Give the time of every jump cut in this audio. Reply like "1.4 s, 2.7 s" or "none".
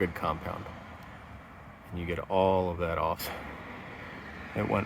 3.2 s

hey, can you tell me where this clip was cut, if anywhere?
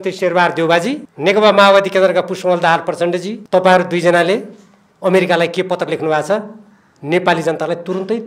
1.1 s, 3.3 s

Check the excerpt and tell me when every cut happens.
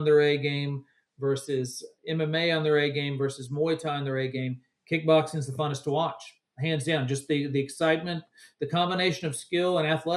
none

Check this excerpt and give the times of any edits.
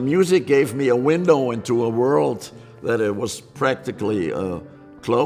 none

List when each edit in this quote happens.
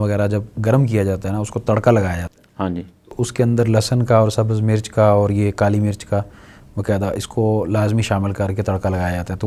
none

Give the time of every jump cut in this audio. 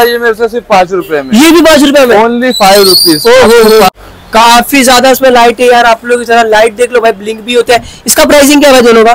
3.9 s

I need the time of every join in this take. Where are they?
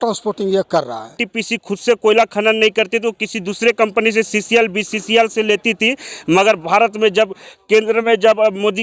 1.3 s

